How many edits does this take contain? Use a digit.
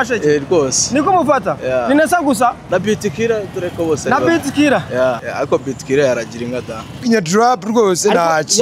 3